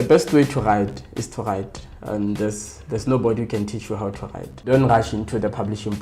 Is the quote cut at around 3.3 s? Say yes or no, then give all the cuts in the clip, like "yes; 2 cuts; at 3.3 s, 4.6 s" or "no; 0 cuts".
no; 1 cut; at 4.7 s